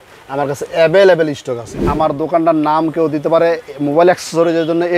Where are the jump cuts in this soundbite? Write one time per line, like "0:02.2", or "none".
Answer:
0:01.8